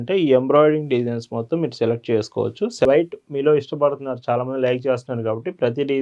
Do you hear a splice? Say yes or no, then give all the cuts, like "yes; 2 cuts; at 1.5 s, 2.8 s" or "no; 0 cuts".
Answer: yes; 1 cut; at 2.8 s